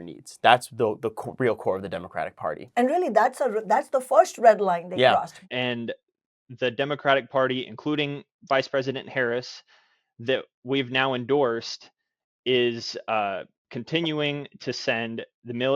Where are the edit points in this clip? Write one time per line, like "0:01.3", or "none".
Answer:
0:05.4